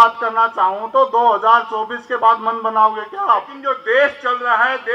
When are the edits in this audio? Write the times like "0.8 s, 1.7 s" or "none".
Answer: 3.5 s